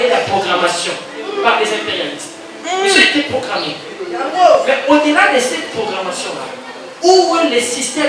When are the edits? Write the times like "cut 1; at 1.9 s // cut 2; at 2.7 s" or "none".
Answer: none